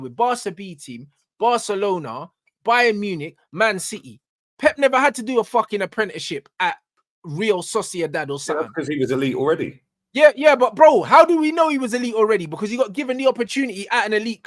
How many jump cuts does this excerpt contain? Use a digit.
0